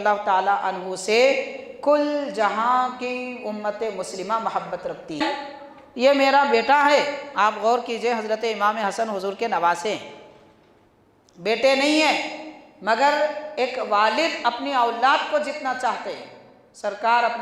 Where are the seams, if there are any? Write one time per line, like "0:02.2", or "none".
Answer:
0:05.2